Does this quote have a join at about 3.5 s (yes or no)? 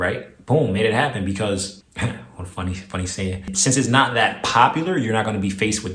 yes